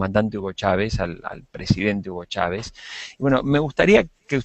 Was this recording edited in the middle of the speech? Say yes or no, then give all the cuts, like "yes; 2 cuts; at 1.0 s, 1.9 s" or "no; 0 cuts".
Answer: yes; 1 cut; at 1.4 s